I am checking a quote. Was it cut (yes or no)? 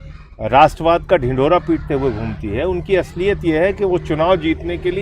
no